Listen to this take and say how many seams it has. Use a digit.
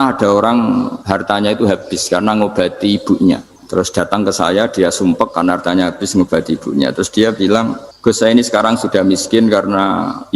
3